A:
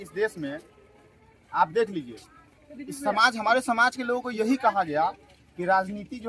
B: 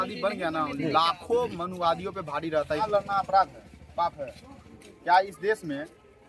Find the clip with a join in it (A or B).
B